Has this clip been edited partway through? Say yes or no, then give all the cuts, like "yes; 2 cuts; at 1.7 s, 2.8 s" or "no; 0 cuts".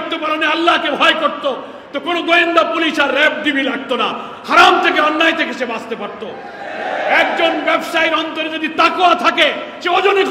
no; 0 cuts